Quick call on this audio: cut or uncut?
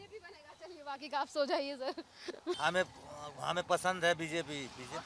cut